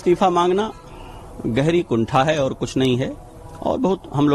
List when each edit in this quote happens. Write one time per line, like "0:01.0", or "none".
none